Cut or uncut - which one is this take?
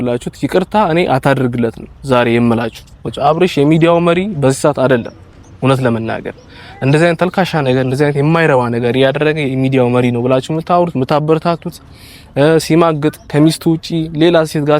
cut